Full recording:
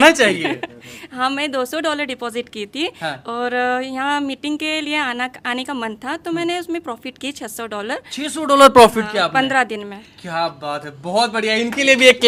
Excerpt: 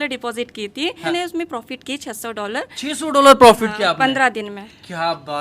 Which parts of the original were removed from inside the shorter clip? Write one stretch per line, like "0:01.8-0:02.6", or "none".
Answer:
0:03.0-0:06.4